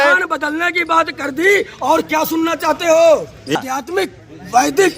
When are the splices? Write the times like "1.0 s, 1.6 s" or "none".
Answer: 3.6 s